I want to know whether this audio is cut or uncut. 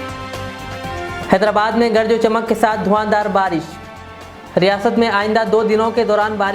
cut